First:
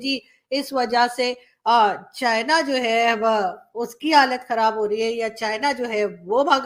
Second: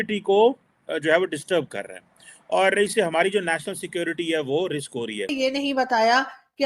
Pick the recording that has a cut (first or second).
second